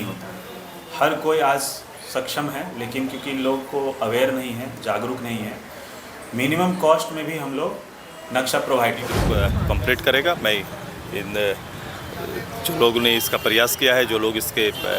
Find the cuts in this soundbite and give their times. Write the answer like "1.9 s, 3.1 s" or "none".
9.2 s